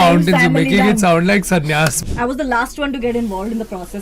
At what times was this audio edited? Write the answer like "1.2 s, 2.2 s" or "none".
2.0 s